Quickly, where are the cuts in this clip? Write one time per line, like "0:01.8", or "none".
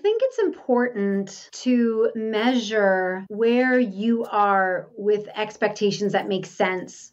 0:01.4
0:02.2
0:03.2